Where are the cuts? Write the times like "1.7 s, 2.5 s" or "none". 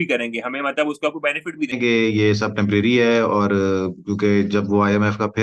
1.8 s